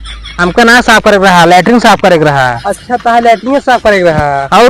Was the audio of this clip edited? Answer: no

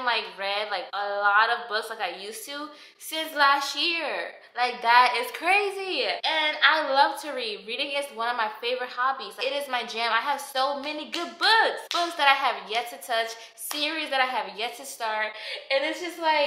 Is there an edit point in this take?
no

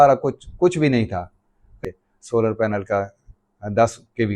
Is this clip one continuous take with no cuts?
no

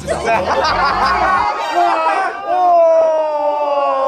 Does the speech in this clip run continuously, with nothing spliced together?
yes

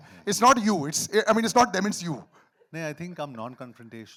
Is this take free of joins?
yes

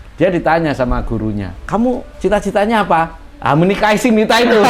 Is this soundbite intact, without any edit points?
no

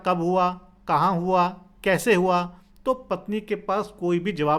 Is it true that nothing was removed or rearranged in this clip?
yes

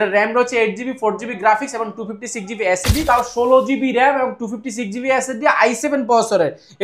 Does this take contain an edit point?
yes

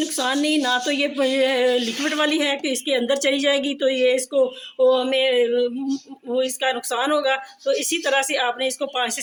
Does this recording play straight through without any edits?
yes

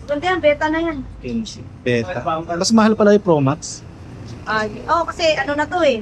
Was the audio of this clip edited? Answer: no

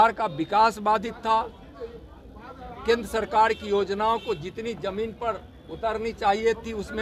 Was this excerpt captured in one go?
yes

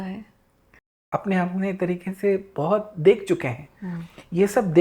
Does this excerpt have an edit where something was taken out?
yes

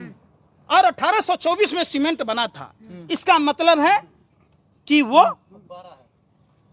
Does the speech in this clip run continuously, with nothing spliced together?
yes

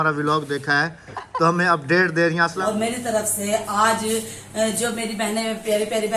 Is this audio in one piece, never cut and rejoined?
no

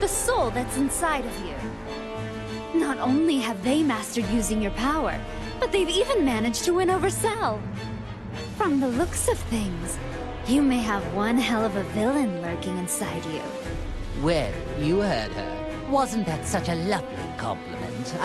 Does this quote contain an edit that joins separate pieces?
yes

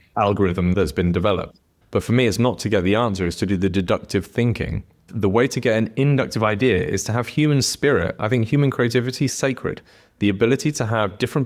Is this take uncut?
no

